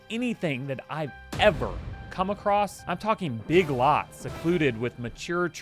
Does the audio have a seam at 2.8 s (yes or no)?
yes